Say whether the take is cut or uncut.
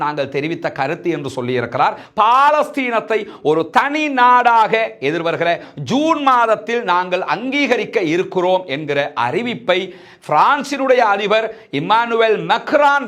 cut